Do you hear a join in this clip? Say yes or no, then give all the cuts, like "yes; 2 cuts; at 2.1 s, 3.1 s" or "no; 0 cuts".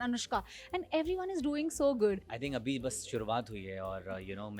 yes; 1 cut; at 2.3 s